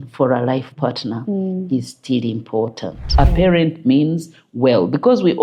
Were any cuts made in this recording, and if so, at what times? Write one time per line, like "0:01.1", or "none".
0:03.1